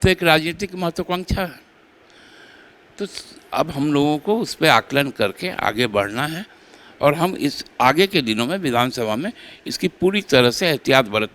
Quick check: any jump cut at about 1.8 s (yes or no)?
no